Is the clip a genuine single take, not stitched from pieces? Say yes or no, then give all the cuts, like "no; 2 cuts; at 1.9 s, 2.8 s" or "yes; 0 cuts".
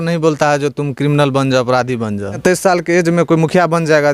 no; 1 cut; at 2.4 s